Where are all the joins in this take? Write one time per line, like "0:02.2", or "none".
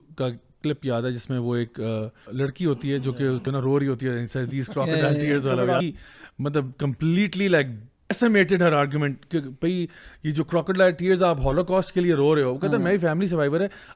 0:02.2
0:03.4
0:05.8
0:08.1